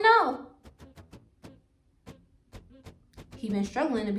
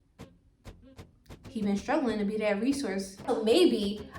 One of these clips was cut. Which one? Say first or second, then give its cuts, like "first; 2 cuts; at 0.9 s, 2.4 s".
second; 1 cut; at 3.2 s